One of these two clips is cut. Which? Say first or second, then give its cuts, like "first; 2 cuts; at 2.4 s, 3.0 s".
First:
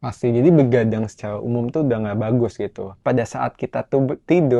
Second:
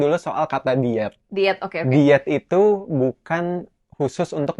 first; 1 cut; at 3.0 s